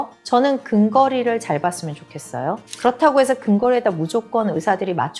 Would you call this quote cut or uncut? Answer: uncut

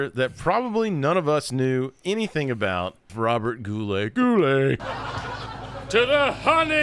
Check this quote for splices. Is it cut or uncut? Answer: cut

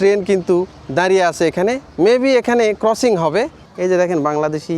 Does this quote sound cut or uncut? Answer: cut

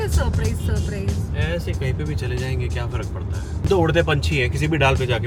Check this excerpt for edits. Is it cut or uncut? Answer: uncut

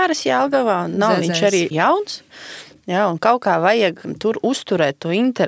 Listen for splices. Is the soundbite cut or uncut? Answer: cut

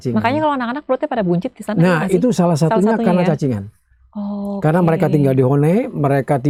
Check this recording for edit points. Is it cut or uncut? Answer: uncut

